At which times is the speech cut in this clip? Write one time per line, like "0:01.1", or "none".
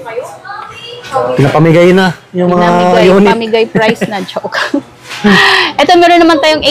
none